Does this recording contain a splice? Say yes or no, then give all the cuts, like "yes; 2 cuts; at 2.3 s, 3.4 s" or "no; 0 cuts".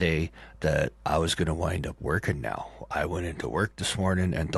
no; 0 cuts